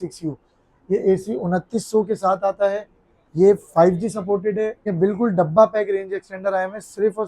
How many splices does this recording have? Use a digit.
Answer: 1